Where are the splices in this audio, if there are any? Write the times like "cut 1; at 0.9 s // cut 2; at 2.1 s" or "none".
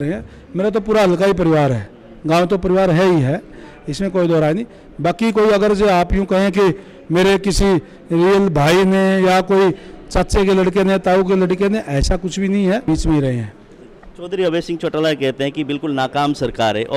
cut 1; at 12.9 s